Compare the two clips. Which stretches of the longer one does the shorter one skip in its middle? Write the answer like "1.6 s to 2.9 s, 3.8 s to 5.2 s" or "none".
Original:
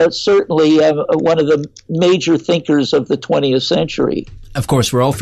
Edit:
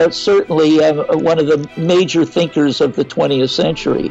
1.7 s to 1.8 s